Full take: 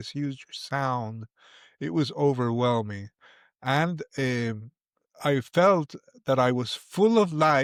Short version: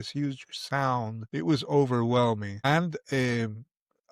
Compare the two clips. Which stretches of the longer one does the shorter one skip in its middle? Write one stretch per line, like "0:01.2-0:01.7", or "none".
0:01.2-0:01.7
0:03.0-0:03.6